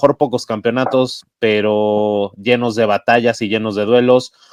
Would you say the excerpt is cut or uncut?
uncut